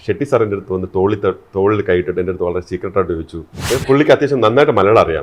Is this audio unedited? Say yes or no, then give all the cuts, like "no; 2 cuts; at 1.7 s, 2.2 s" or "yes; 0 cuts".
no; 1 cut; at 3.5 s